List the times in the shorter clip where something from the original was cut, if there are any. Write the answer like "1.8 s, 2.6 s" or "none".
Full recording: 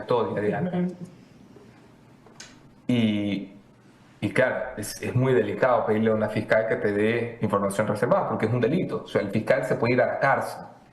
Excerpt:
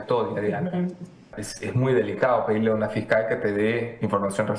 1.4 s